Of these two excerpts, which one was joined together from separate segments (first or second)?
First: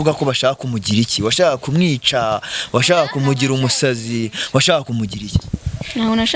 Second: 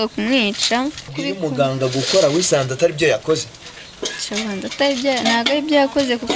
second